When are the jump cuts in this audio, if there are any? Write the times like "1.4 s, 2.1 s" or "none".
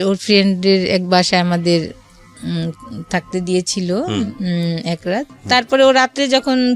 5.3 s